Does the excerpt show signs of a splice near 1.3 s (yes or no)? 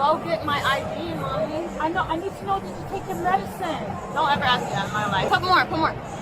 no